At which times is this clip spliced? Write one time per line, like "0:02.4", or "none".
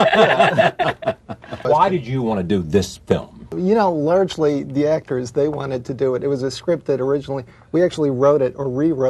0:01.8